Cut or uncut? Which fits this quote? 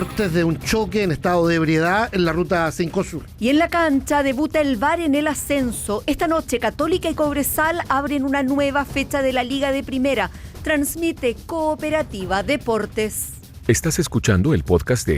cut